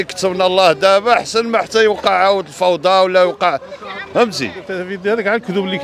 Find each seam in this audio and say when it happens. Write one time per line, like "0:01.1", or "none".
0:04.7